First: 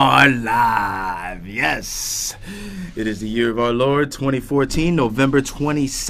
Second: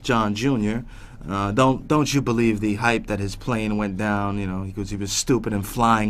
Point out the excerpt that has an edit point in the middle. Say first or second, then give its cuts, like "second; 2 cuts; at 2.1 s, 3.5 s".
second; 1 cut; at 2.9 s